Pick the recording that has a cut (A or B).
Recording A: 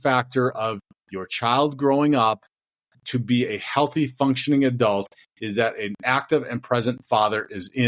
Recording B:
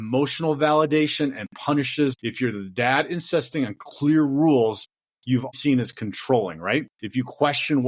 B